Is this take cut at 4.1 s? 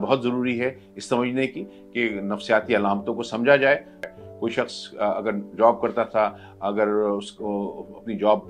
yes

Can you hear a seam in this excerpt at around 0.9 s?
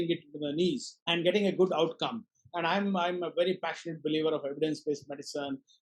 yes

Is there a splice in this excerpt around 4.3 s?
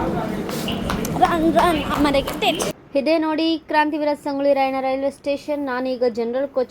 no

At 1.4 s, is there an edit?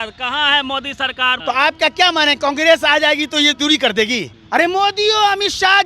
yes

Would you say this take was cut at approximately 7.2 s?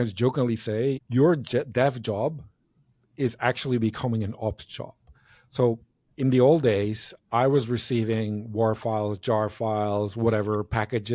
no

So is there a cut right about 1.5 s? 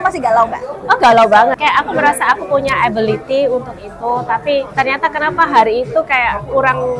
yes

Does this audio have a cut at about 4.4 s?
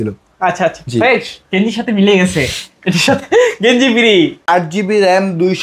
yes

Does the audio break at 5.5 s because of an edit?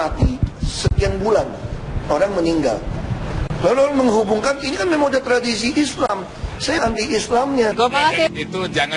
no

